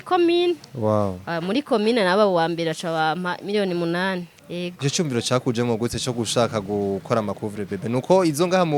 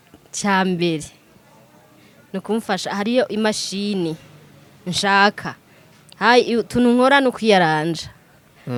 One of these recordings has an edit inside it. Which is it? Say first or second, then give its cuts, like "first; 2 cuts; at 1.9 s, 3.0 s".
first; 1 cut; at 4.4 s